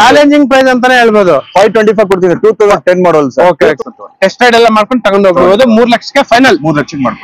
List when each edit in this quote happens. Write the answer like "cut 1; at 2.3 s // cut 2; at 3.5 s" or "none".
cut 1; at 3.8 s